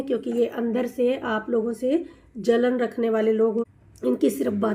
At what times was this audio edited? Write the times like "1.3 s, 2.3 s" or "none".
3.7 s